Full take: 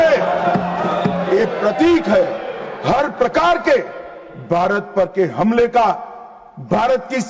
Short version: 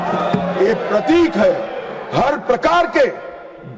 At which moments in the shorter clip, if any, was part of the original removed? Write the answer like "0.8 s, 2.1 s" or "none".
none